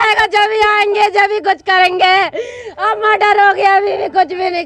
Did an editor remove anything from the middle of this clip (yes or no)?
no